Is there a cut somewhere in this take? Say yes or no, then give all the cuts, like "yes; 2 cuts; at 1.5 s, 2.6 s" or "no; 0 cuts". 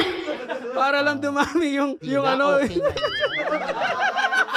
no; 0 cuts